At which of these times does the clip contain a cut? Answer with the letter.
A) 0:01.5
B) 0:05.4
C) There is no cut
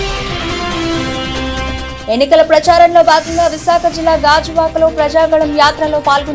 A